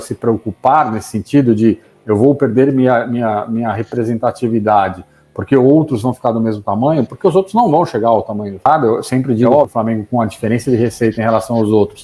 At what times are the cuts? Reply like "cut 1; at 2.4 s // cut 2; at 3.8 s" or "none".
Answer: cut 1; at 8.6 s